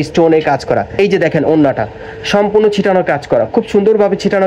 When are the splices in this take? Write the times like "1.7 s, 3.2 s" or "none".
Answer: 0.9 s